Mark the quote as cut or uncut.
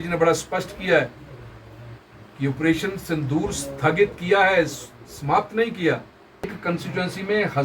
cut